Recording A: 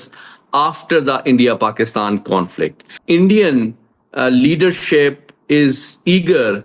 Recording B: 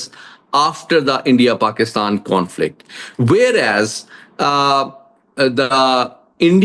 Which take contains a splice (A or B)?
A